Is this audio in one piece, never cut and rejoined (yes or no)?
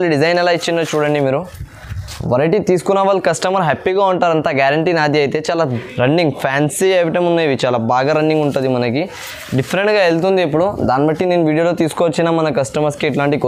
no